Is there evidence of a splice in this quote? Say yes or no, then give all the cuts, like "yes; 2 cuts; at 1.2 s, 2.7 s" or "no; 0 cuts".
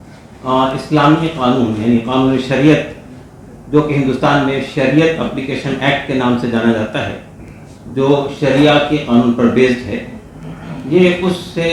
no; 0 cuts